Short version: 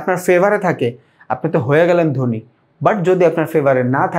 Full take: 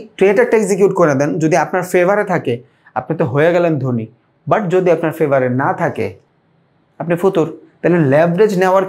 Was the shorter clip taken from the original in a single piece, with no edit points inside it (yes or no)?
yes